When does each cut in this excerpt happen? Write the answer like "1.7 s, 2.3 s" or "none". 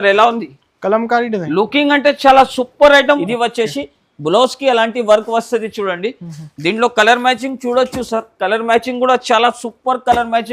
3.2 s